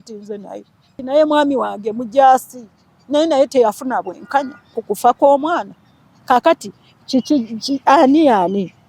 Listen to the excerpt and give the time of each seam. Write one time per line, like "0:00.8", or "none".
0:01.0